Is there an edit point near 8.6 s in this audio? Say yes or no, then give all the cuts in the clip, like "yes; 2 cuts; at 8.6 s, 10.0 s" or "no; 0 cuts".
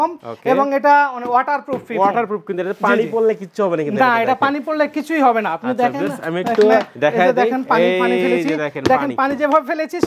no; 0 cuts